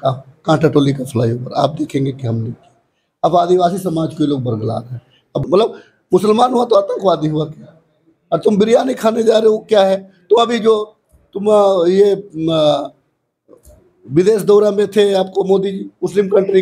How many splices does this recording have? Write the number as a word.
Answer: one